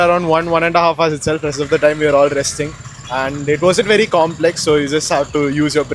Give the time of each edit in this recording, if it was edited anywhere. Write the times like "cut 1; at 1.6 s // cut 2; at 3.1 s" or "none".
none